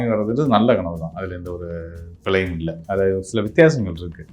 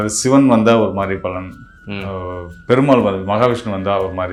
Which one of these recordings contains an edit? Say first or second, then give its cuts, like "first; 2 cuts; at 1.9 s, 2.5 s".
first; 1 cut; at 2.8 s